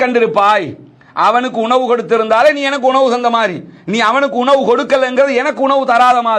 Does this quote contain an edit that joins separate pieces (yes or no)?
no